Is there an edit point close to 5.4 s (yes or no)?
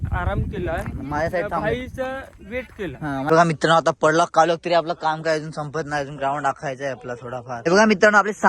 no